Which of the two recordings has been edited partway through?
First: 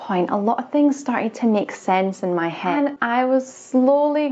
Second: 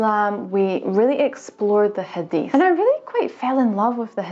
first; 1 cut; at 3.0 s

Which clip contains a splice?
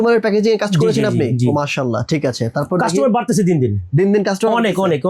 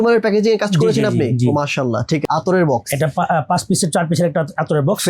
second; 1 cut; at 2.2 s

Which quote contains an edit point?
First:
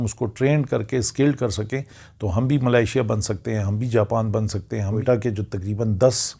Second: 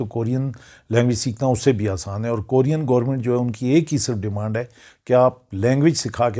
first; 1 cut; at 5.0 s

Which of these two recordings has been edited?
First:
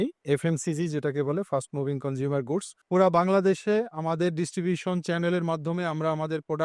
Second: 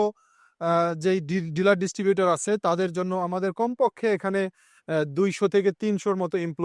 first; 1 cut; at 2.8 s

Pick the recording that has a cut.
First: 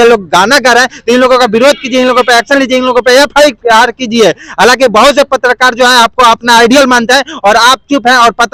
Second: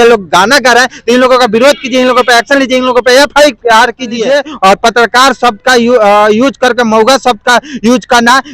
second; 1 cut; at 4.2 s

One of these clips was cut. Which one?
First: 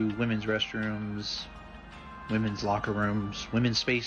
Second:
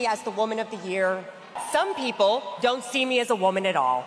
second; 1 cut; at 1.6 s

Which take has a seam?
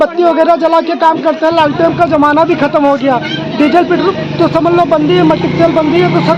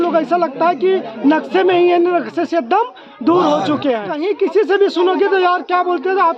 second; 1 cut; at 4.3 s

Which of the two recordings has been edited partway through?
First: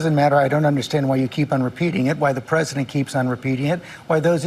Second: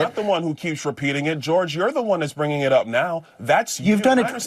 second; 1 cut; at 1.5 s

